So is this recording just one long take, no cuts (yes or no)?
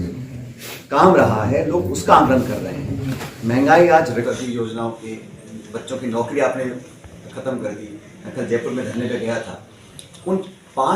no